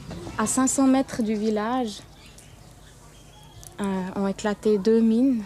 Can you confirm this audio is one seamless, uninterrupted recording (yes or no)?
no